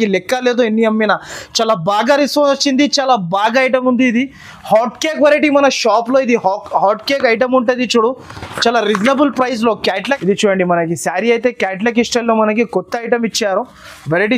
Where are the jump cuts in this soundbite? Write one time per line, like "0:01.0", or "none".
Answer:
0:10.1